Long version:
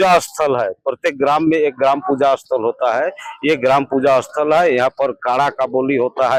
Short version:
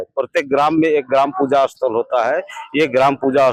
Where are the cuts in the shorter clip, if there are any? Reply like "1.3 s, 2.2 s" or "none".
none